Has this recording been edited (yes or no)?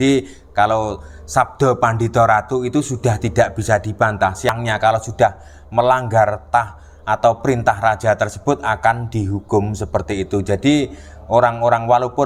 yes